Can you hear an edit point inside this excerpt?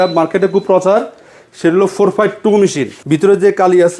yes; 1 cut; at 2.9 s

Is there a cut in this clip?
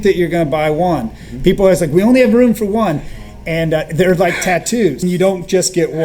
yes; 1 cut; at 5.0 s

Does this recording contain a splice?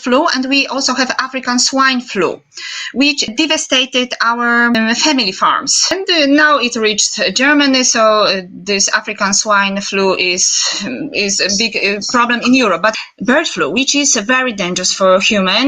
yes; 4 cuts; at 3.3 s, 4.8 s, 5.9 s, 12.9 s

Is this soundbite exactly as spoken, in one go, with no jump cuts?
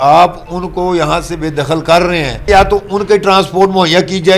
no; 1 cut; at 2.5 s

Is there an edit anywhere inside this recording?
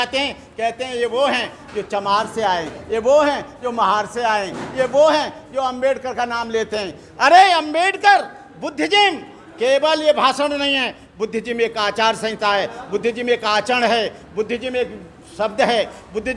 no; 0 cuts

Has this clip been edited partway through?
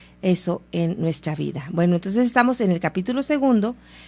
no; 0 cuts

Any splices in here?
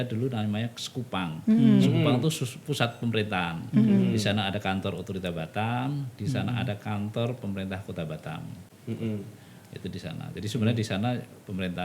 no; 0 cuts

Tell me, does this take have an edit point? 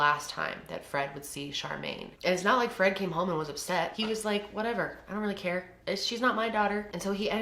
yes; 3 cuts; at 2.1 s, 3.9 s, 5.7 s

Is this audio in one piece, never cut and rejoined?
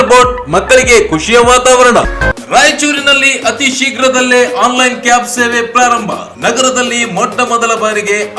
no; 1 cut; at 2.1 s

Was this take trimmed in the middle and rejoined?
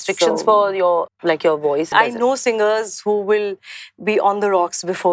yes; 2 cuts; at 1.1 s, 1.9 s

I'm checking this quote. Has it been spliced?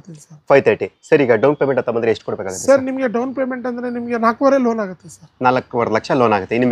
no; 0 cuts

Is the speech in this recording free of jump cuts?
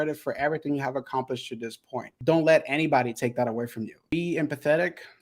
no; 2 cuts; at 2.1 s, 4.1 s

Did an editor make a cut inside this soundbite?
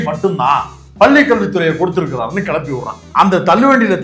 yes; 1 cut; at 3.0 s

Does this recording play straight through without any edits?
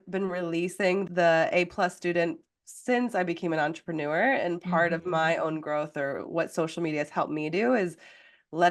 no; 1 cut; at 1.0 s

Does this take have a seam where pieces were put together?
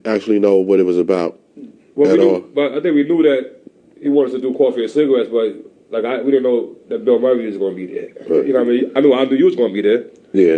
yes; 1 cut; at 2.4 s

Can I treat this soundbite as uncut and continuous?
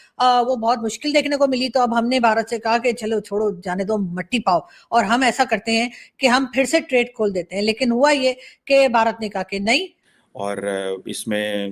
no; 1 cut; at 10.0 s

